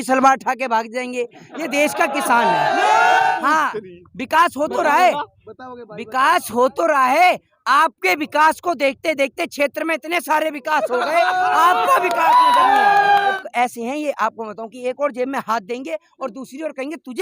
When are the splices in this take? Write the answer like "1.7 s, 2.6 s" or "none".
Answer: 3.3 s, 13.4 s